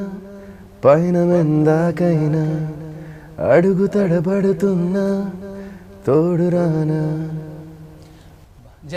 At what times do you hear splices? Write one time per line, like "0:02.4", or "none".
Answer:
none